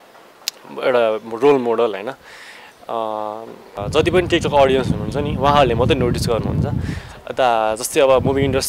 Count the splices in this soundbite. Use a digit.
1